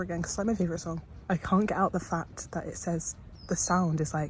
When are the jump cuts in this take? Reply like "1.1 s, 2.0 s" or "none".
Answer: 1.1 s